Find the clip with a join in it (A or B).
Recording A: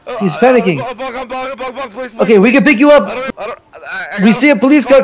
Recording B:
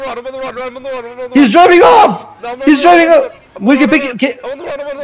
A